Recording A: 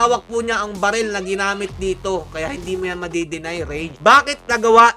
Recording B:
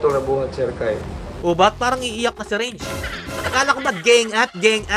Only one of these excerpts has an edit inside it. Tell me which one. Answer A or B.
A